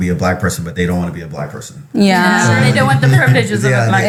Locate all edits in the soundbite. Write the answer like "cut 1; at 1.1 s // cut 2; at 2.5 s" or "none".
none